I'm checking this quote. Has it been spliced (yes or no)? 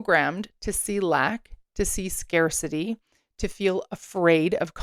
no